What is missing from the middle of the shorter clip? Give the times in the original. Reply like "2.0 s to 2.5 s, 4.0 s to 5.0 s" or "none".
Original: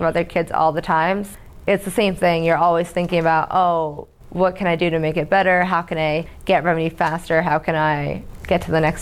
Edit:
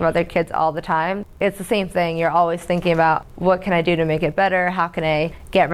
1.3 s to 1.5 s, 3.5 s to 4.2 s